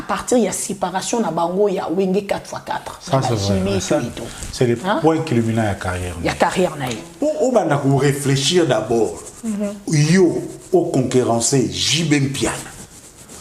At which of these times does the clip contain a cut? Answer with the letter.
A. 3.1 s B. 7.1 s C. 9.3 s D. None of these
B